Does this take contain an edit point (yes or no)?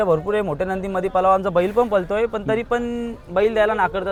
no